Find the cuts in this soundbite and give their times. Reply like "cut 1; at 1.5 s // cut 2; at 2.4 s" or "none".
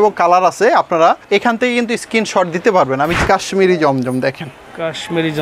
cut 1; at 1.2 s // cut 2; at 3.2 s